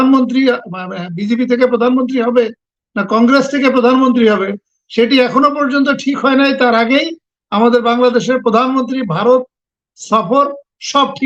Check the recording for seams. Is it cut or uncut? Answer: uncut